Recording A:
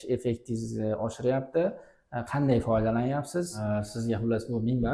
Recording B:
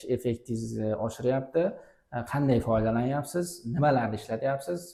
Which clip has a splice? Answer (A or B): A